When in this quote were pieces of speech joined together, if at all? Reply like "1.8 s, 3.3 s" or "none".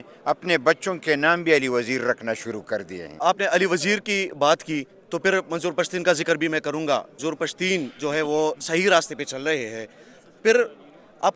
3.2 s, 7.1 s